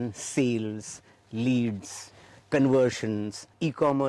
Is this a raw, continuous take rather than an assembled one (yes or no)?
yes